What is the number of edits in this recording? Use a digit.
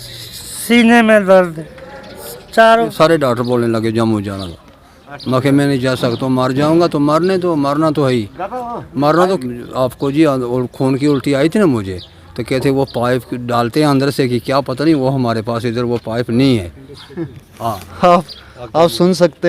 2